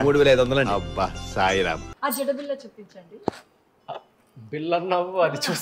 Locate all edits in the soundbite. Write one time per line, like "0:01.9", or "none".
0:01.9